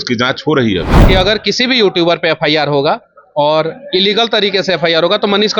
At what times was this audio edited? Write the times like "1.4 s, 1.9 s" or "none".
0.9 s